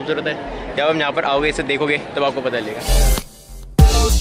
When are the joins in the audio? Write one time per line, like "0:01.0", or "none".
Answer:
0:02.9